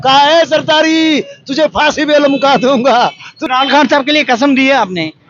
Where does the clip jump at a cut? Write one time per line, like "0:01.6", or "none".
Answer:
0:03.3